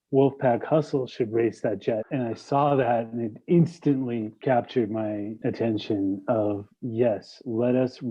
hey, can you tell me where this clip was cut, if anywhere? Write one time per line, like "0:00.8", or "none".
0:02.0